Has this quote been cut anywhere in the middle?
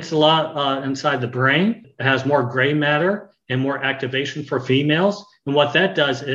yes; 1 cut; at 1.9 s

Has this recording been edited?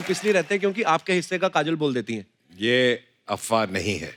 no; 0 cuts

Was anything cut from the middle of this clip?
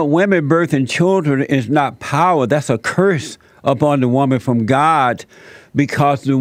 no; 0 cuts

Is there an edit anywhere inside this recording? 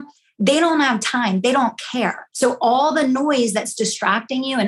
yes; 1 cut; at 2.3 s

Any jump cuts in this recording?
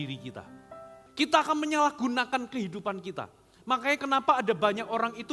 yes; 1 cut; at 1.0 s

